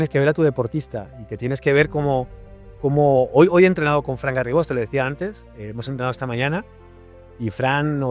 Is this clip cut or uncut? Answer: uncut